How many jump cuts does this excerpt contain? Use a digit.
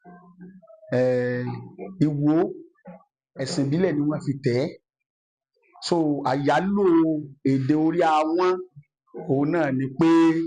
0